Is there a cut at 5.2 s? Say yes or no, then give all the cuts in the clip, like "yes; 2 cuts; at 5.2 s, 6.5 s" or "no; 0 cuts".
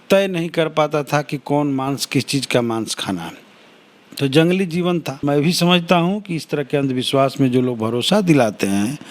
yes; 1 cut; at 5.2 s